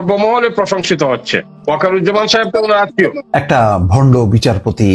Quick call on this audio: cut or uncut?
cut